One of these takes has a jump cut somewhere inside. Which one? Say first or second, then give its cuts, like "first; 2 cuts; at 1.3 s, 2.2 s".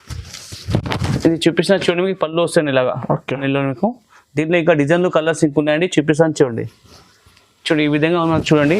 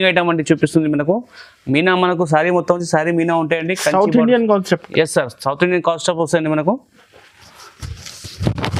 first; 1 cut; at 3.4 s